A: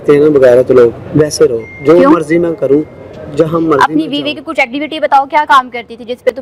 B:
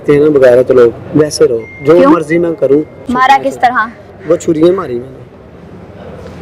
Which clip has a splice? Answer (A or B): B